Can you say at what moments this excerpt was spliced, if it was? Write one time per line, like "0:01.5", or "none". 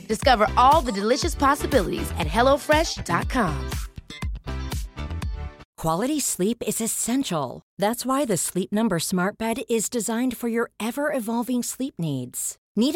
0:05.6